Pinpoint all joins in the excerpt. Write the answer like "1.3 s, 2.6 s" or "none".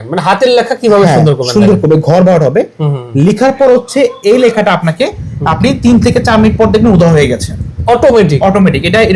none